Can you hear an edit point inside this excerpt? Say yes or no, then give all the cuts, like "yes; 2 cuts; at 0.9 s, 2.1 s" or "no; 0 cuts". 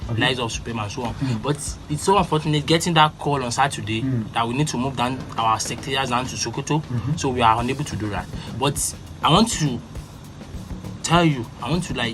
no; 0 cuts